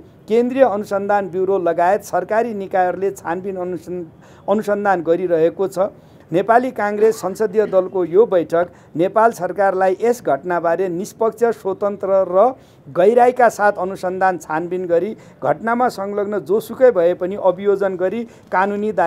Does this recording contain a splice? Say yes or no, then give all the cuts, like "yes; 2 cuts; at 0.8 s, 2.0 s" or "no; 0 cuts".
no; 0 cuts